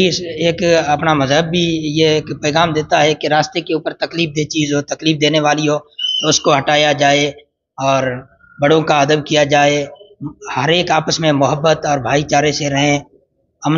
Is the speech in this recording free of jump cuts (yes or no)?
yes